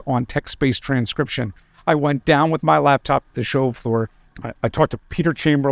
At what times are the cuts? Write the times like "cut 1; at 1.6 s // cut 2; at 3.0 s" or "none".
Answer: cut 1; at 4.2 s